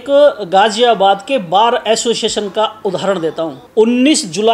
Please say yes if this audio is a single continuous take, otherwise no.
no